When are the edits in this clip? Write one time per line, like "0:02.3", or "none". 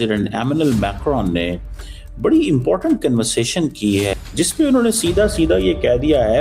0:04.1